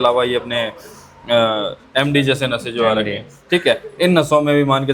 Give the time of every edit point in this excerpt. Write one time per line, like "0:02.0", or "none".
none